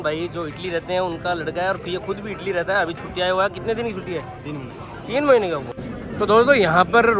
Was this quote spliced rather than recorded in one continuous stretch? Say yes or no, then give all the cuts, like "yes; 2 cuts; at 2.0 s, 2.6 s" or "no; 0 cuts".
yes; 1 cut; at 5.7 s